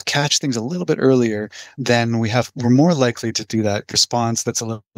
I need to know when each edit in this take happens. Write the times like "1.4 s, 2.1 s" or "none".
1.7 s, 3.9 s